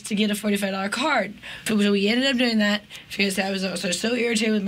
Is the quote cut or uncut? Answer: cut